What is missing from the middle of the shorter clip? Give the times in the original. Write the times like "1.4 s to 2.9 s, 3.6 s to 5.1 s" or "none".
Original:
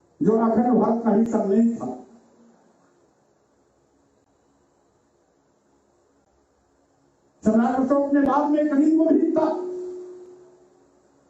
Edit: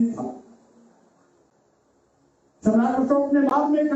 3.8 s to 6.9 s